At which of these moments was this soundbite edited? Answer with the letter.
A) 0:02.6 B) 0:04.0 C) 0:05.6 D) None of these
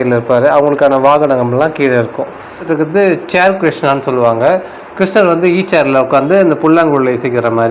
A